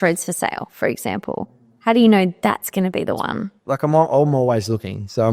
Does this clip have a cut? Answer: yes; 1 cut; at 3.5 s

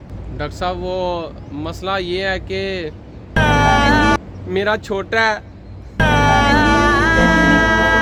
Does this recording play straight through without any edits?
yes; 0 cuts

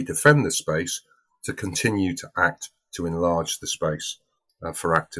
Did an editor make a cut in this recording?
no; 0 cuts

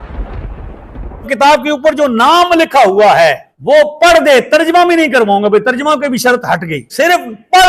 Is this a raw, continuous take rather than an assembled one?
no; 3 cuts; at 1.3 s, 3.5 s, 6.9 s

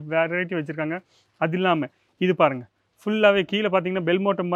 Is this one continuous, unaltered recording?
yes; 0 cuts

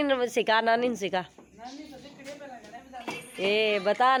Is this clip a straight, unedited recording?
yes; 0 cuts

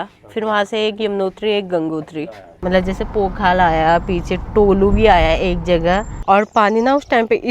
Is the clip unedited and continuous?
no; 2 cuts; at 2.6 s, 6.2 s

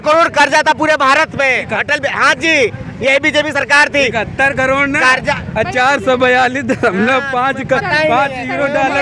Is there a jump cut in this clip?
no; 0 cuts

